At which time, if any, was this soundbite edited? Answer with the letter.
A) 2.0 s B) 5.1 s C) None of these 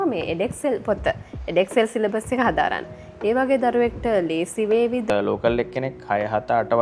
B